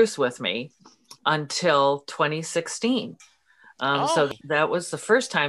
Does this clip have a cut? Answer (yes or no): yes